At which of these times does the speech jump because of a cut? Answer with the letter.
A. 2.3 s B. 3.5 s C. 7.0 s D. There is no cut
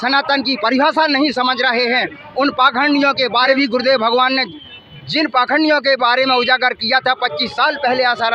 B